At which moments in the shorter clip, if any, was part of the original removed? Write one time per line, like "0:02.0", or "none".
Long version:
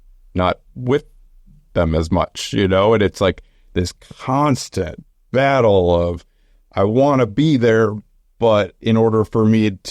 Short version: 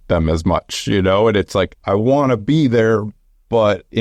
0:01.8